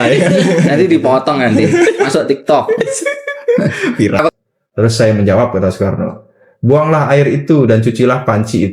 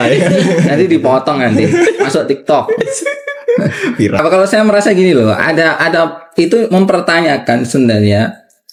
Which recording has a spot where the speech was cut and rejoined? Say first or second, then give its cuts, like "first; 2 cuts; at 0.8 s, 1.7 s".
first; 1 cut; at 4.3 s